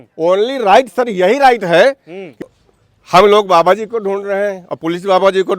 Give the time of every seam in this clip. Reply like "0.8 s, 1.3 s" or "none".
2.5 s

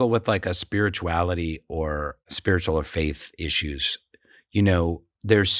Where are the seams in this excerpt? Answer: 2.3 s

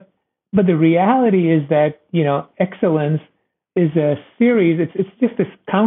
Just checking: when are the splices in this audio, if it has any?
3.6 s

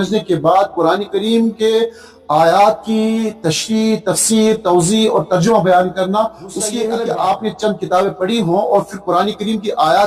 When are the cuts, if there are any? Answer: 6.7 s

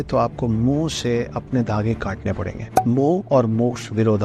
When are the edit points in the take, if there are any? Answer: 2.8 s

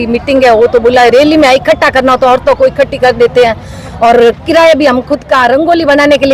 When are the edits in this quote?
none

